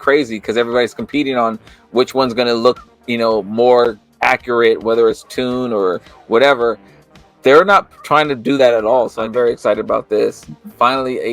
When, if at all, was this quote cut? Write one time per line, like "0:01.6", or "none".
0:09.2